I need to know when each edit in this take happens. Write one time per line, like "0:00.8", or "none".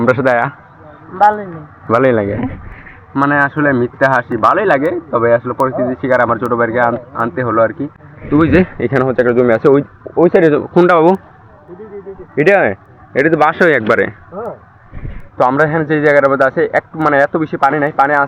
none